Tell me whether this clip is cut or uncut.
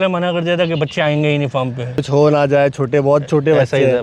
cut